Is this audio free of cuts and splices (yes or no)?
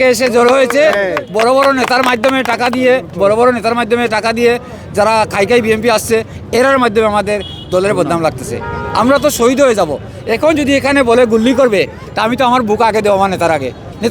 yes